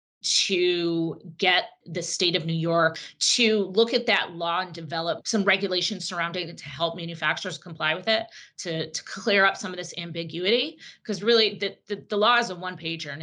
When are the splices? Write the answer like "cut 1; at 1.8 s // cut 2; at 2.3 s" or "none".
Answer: cut 1; at 3.0 s